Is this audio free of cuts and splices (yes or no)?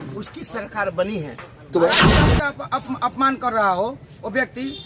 no